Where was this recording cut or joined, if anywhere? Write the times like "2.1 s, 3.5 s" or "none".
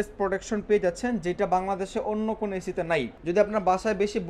3.1 s